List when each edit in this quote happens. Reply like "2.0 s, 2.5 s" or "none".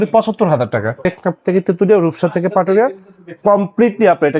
1.1 s

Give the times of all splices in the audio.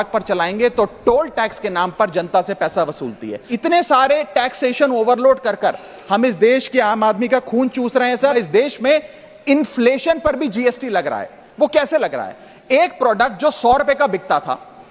3.4 s, 8.3 s

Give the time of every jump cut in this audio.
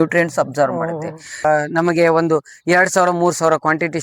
1.4 s

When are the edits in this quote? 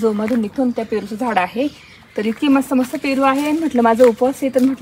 none

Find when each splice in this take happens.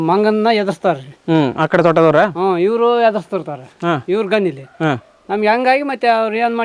none

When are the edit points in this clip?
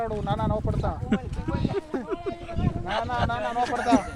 none

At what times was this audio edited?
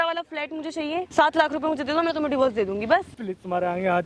1.0 s, 3.1 s

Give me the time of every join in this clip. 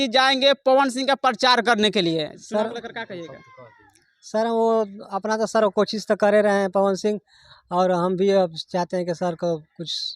2.3 s

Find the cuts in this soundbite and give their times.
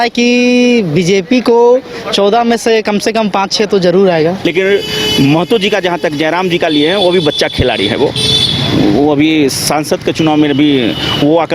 4.4 s

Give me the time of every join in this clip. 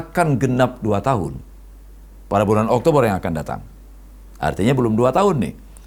none

